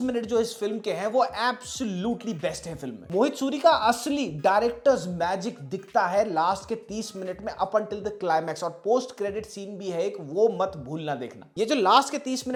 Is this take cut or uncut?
uncut